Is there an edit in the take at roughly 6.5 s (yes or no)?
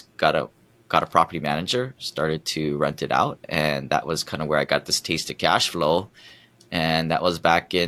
no